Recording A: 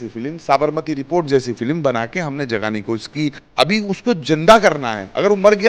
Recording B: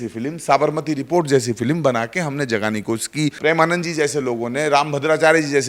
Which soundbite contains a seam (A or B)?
A